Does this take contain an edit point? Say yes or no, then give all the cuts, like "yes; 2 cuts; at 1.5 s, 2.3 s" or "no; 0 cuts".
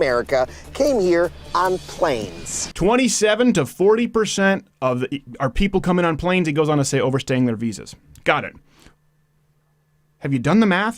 yes; 1 cut; at 2.6 s